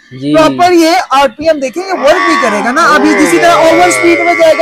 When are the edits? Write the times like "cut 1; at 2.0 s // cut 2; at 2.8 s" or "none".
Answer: none